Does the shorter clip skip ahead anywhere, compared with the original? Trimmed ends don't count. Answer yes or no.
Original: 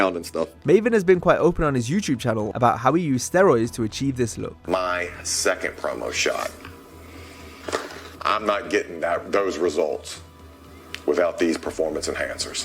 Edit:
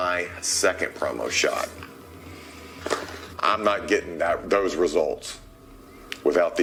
no